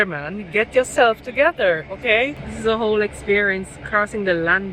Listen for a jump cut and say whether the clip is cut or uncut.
cut